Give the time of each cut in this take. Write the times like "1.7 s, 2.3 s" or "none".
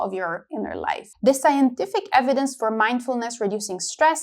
1.1 s